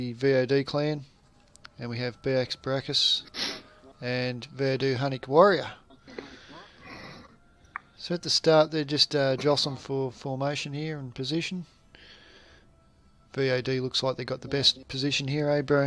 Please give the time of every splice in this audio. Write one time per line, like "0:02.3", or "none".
0:14.8